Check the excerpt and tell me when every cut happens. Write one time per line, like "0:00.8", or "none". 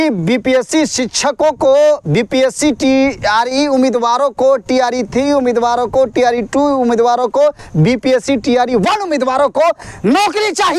none